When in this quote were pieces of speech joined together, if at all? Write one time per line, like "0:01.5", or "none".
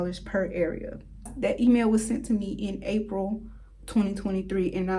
0:01.3